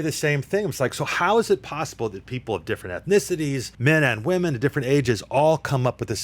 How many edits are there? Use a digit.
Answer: 1